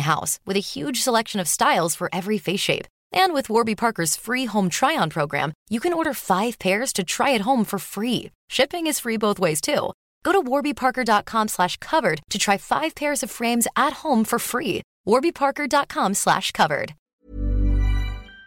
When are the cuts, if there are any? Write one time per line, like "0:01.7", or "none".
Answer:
0:17.0

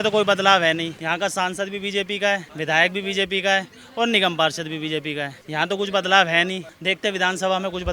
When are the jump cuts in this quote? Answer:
0:01.0
0:02.5
0:05.4
0:06.7

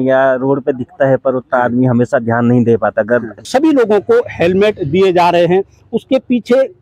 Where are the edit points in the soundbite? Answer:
0:03.5

